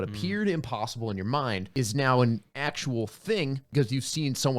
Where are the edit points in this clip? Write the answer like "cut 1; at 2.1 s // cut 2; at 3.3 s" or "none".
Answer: cut 1; at 1.7 s // cut 2; at 2.5 s // cut 3; at 3.6 s